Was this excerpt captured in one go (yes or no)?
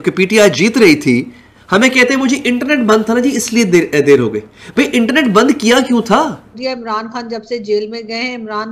no